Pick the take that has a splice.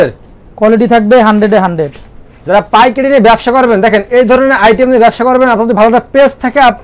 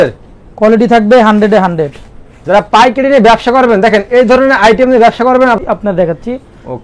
second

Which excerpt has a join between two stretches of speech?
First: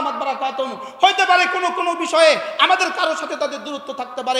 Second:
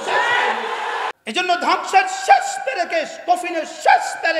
second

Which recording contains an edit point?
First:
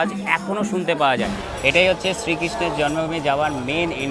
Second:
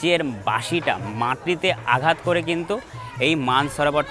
first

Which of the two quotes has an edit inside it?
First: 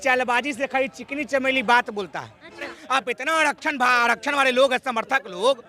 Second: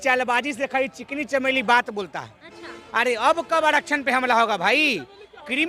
first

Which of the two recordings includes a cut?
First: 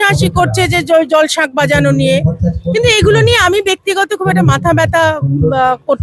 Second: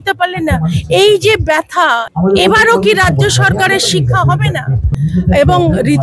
second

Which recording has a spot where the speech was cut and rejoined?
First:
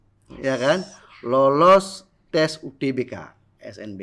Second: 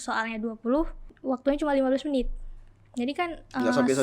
second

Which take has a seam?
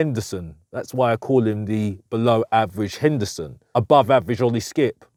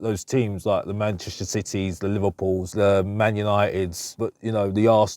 second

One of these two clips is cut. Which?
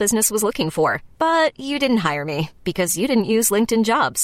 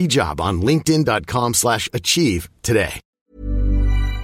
second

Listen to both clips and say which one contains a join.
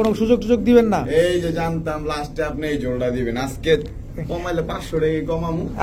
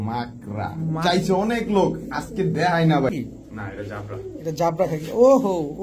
second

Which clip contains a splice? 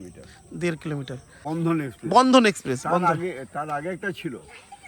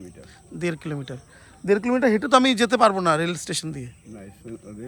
first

